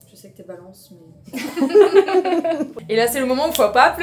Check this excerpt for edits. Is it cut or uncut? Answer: cut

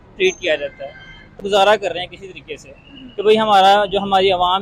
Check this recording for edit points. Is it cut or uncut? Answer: cut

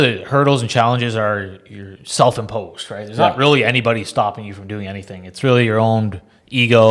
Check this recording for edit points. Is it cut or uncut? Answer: uncut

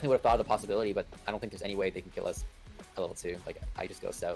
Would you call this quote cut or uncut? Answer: uncut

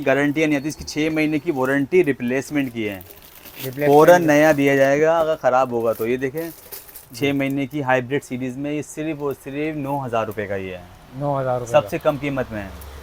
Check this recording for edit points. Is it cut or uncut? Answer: uncut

